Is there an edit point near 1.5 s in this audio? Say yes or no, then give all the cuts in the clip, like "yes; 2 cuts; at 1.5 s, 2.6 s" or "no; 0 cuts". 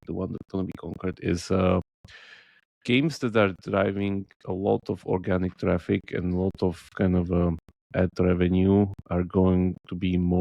no; 0 cuts